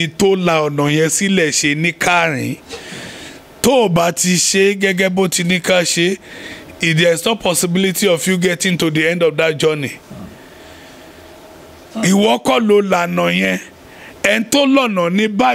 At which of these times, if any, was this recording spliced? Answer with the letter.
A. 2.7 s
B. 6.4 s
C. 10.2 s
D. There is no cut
D